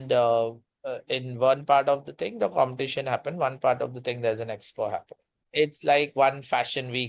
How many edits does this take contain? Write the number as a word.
one